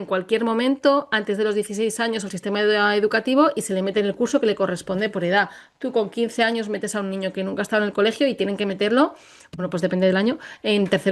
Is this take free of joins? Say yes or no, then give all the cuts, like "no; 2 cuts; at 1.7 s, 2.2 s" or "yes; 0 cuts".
yes; 0 cuts